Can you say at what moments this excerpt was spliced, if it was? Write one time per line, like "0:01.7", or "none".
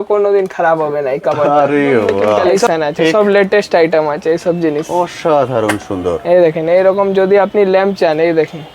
0:02.7